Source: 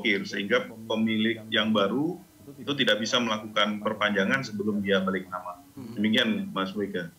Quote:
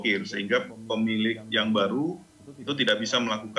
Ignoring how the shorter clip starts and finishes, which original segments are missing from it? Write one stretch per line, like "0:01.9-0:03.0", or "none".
none